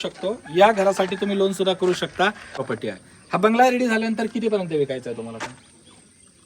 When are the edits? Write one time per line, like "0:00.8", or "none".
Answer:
0:02.6